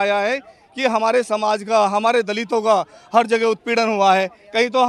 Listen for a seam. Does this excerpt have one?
no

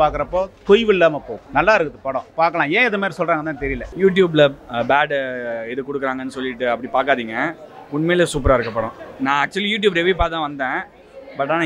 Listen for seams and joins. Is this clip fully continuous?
no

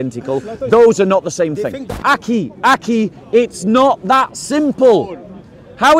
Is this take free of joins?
no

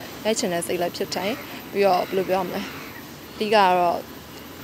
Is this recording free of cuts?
yes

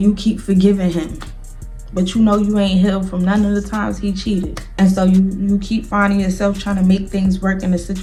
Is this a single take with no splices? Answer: yes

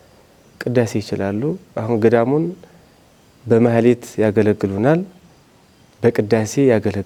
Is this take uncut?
yes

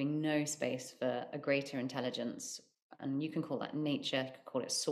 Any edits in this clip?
no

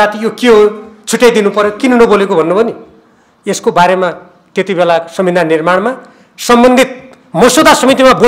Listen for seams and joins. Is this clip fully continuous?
yes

